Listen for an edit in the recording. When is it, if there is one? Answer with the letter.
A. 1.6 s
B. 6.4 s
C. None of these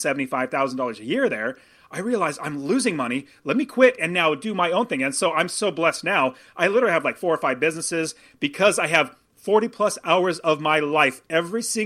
C